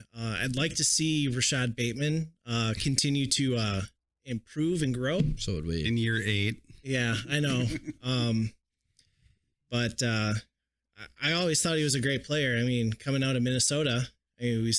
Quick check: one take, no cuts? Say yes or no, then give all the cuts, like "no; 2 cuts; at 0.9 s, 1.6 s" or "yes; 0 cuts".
yes; 0 cuts